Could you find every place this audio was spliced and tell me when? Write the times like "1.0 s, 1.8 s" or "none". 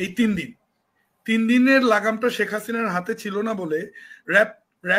none

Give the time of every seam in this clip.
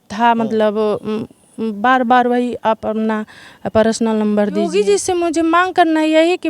4.7 s

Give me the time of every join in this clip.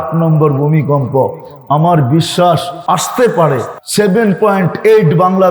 2.7 s, 3.8 s

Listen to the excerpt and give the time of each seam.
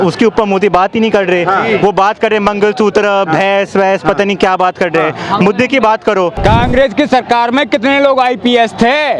6.3 s

